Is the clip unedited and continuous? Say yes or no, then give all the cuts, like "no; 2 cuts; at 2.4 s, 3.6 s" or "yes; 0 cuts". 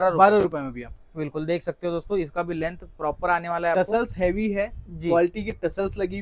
yes; 0 cuts